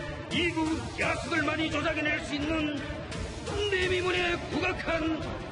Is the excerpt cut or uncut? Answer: uncut